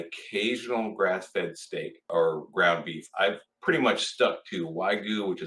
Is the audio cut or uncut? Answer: cut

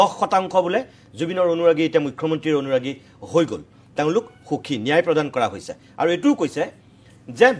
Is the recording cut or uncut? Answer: uncut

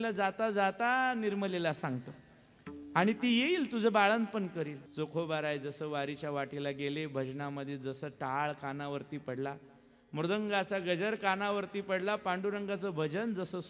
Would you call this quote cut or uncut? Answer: cut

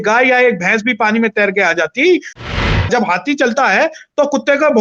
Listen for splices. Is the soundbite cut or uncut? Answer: cut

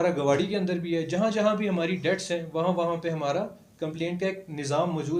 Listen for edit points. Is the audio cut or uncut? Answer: uncut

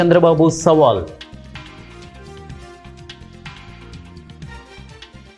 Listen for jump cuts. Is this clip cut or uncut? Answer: cut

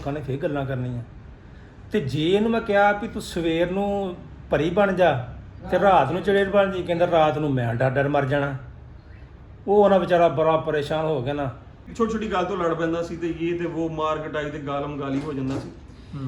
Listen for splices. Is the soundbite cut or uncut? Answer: cut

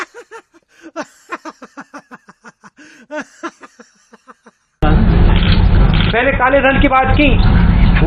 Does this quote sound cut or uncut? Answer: cut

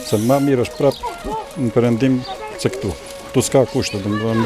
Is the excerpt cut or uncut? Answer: uncut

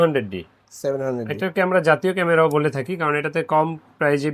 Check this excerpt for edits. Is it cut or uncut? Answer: uncut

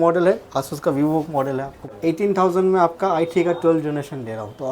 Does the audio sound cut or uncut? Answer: cut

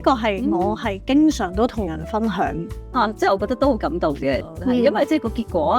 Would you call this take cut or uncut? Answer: cut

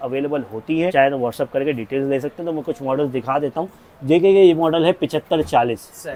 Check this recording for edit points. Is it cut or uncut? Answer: uncut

